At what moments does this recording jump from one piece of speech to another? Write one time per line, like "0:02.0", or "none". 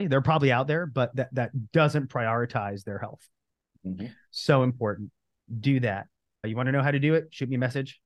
none